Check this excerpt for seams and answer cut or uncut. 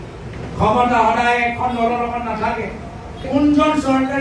cut